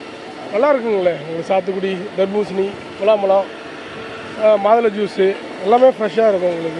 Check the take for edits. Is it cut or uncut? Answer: uncut